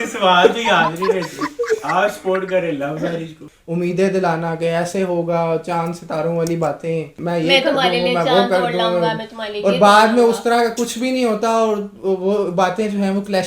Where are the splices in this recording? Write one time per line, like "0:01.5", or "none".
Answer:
0:03.5
0:07.2